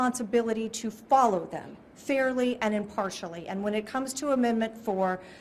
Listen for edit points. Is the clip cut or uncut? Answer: uncut